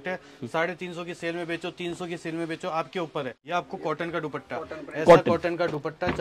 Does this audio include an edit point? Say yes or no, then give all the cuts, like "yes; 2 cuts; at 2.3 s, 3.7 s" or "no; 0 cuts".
yes; 1 cut; at 3.3 s